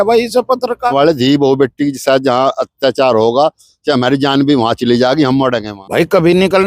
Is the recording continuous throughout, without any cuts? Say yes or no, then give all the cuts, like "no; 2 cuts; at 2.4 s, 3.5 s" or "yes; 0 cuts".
no; 2 cuts; at 0.9 s, 5.7 s